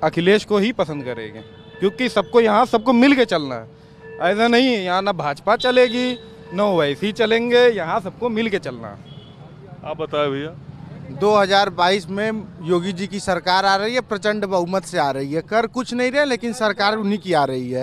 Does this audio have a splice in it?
no; 0 cuts

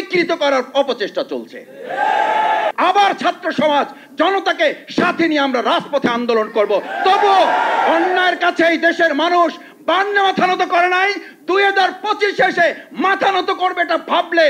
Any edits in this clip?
yes; 1 cut; at 2.7 s

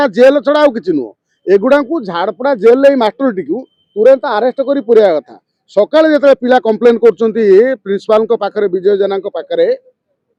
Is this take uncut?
yes; 0 cuts

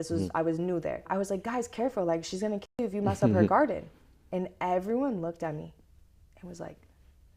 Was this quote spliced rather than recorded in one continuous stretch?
yes; 1 cut; at 1.1 s

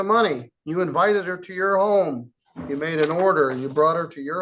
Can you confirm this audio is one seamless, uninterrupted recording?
no; 1 cut; at 1.4 s

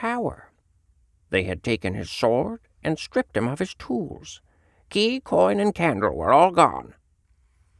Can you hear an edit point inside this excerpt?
yes; 1 cut; at 1.0 s

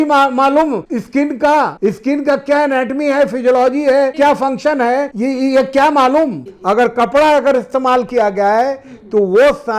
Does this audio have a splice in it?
yes; 5 cuts; at 0.9 s, 1.7 s, 4.1 s, 5.1 s, 6.5 s

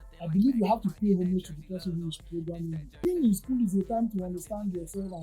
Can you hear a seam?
yes; 1 cut; at 2.9 s

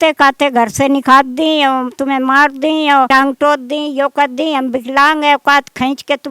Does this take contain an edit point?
yes; 1 cut; at 3.1 s

